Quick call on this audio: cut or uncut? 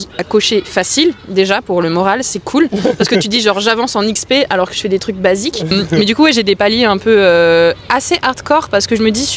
cut